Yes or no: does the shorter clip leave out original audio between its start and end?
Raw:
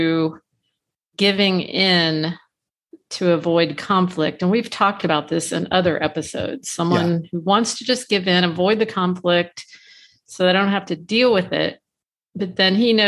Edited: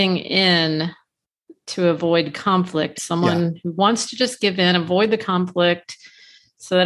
yes